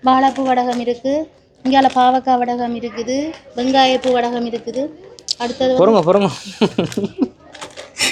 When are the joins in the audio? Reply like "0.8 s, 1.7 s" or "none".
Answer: none